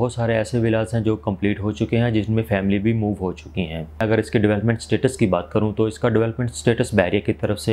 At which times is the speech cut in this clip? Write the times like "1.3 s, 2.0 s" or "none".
4.0 s